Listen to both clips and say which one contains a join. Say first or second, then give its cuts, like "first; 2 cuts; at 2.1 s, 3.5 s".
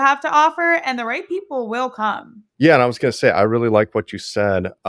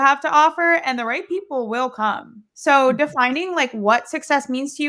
second; 1 cut; at 2.4 s